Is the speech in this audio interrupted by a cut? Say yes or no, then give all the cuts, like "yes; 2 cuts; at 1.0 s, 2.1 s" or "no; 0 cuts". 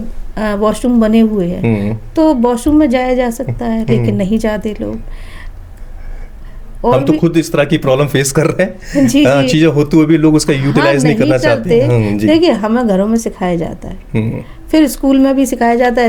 no; 0 cuts